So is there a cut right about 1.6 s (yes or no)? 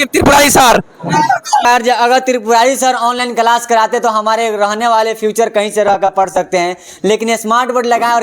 yes